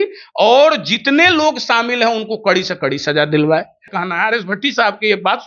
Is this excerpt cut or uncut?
cut